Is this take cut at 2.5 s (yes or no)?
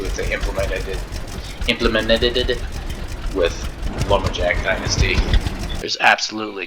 no